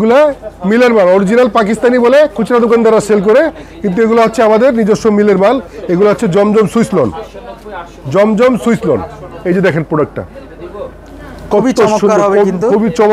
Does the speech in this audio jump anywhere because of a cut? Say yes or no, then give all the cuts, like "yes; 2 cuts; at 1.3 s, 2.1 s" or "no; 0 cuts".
no; 0 cuts